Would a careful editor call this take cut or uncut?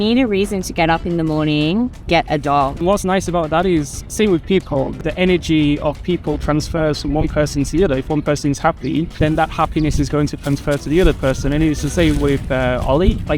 cut